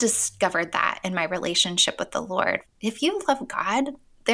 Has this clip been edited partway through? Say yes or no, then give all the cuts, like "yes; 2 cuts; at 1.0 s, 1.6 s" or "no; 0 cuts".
yes; 1 cut; at 2.6 s